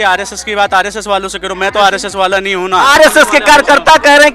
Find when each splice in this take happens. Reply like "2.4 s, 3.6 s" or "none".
2.8 s